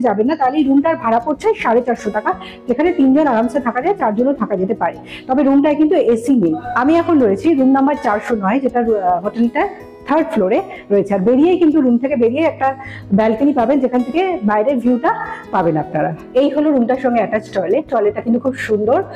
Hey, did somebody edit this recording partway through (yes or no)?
no